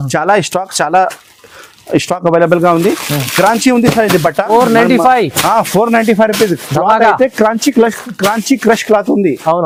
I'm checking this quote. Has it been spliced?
no; 0 cuts

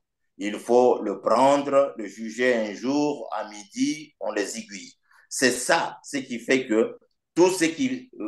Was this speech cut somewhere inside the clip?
no; 0 cuts

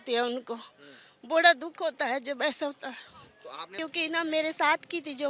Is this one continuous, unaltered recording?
no; 1 cut; at 3.8 s

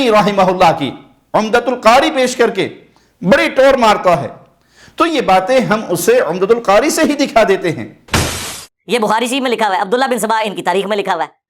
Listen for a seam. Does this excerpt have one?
yes; 1 cut; at 8.4 s

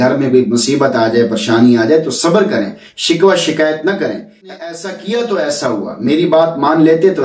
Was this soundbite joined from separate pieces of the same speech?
yes; 1 cut; at 4.5 s

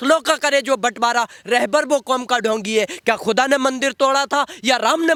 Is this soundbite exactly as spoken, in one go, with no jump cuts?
yes; 0 cuts

